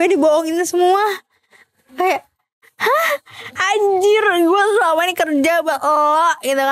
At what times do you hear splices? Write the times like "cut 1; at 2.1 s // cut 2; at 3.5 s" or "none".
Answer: cut 1; at 3.4 s